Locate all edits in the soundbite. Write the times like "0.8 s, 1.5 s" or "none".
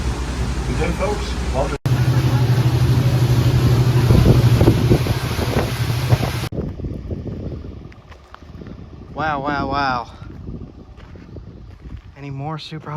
6.5 s